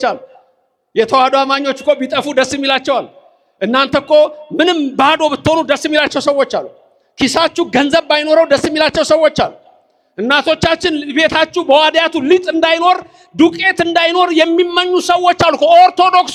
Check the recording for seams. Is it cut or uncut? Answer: uncut